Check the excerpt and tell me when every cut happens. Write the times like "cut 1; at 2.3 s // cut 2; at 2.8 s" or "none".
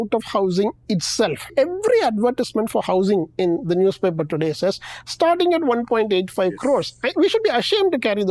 cut 1; at 1.5 s